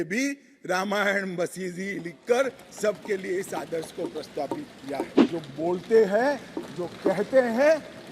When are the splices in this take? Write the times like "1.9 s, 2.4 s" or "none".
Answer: 5.2 s